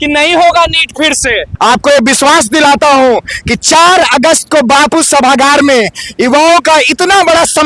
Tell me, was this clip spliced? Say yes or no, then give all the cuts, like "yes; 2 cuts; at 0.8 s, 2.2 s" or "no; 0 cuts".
yes; 1 cut; at 1.4 s